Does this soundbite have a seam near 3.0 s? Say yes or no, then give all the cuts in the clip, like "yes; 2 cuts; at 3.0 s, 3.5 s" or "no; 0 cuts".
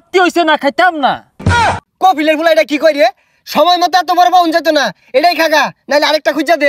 no; 1 cut; at 1.5 s